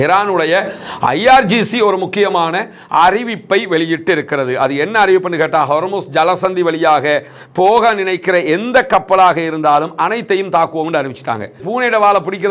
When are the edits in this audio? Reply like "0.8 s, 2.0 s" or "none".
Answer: 11.6 s